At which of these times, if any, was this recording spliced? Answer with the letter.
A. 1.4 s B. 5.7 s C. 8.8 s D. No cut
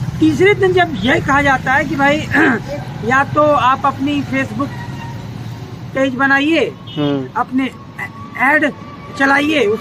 D